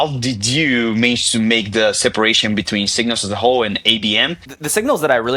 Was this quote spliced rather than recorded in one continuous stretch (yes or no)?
yes